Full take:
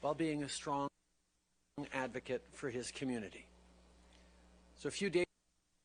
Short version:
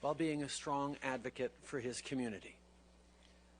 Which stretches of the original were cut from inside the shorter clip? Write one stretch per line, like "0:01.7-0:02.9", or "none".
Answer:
0:00.9-0:01.8